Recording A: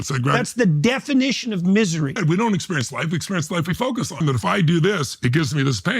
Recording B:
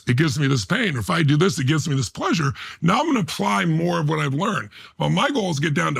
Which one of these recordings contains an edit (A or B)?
A